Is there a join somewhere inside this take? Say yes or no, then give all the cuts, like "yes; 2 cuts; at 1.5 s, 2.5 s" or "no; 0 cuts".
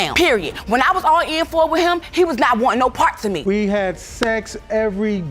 yes; 1 cut; at 3.4 s